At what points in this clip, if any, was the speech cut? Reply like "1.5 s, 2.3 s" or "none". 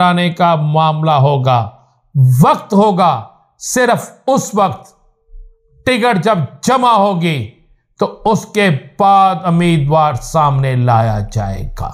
none